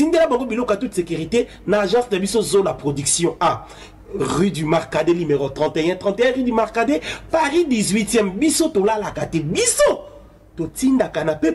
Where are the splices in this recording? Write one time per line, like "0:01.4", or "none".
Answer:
none